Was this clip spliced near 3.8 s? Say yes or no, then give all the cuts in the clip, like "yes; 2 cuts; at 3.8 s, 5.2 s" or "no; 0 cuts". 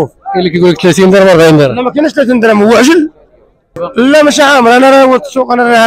yes; 1 cut; at 3.8 s